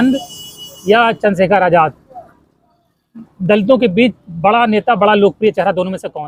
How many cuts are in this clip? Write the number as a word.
zero